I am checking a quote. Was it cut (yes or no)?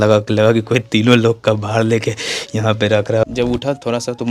yes